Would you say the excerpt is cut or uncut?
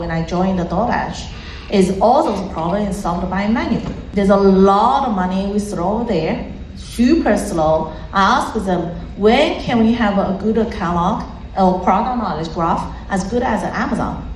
uncut